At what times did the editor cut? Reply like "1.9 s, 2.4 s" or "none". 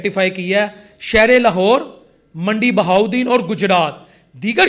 none